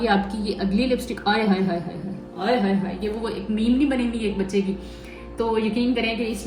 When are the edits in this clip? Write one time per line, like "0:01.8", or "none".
none